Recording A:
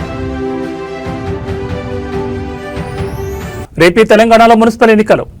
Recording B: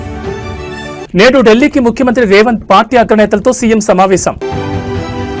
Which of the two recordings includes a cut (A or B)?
A